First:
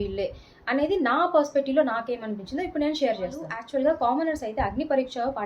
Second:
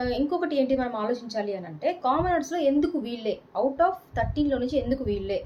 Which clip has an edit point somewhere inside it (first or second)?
first